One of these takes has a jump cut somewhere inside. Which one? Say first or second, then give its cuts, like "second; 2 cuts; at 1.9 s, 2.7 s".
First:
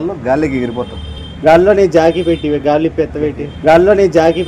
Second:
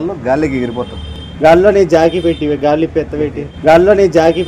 first; 2 cuts; at 1.2 s, 3.4 s